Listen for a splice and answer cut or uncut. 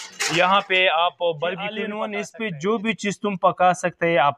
cut